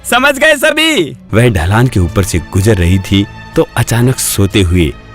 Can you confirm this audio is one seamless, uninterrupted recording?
no; 1 cut; at 1.2 s

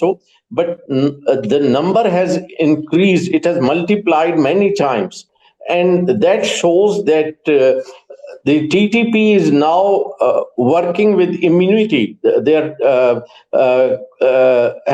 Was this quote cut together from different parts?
no; 0 cuts

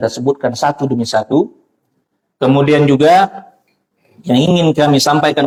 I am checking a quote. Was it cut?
no; 0 cuts

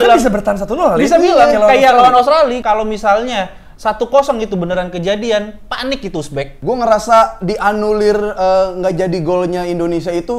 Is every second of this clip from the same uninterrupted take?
no; 2 cuts; at 2.6 s, 6.5 s

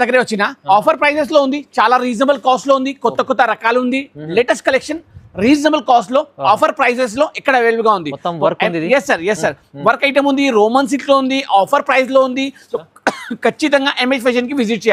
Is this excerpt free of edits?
yes; 0 cuts

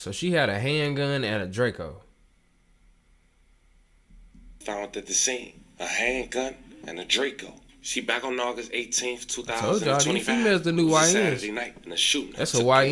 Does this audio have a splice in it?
no; 0 cuts

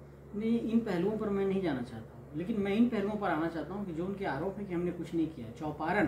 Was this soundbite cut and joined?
no; 0 cuts

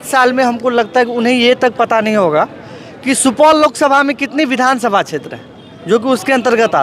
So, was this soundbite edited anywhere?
no; 0 cuts

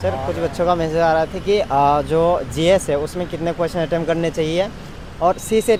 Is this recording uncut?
yes; 0 cuts

